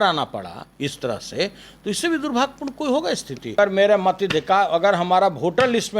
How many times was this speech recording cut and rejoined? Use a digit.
1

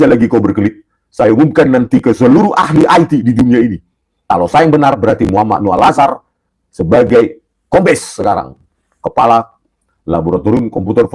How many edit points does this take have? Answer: 1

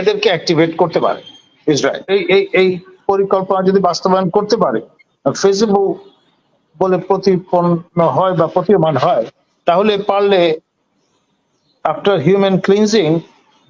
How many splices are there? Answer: 1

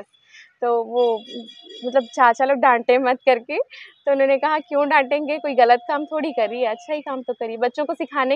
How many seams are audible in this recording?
0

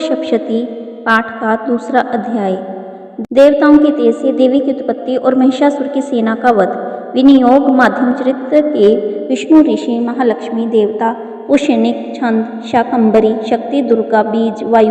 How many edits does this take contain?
1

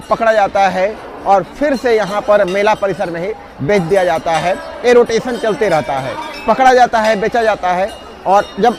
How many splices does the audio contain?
0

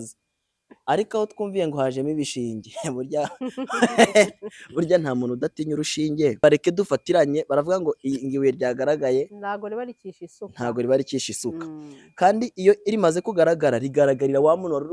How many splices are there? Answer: 1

